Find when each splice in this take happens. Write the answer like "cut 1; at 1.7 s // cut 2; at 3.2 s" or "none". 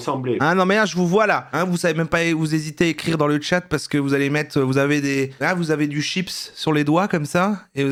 none